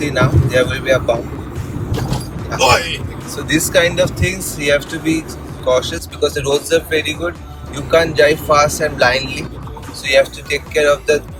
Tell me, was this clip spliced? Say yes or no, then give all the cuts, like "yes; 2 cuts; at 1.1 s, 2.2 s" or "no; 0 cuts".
no; 0 cuts